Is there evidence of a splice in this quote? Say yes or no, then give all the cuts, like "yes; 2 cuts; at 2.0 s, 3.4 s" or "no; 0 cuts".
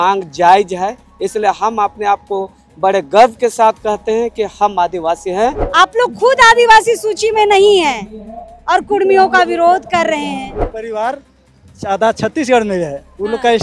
yes; 2 cuts; at 5.6 s, 10.6 s